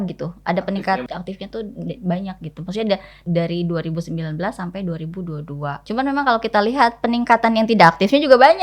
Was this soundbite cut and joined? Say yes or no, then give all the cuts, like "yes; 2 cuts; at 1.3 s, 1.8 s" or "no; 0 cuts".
yes; 3 cuts; at 1.0 s, 3.1 s, 5.8 s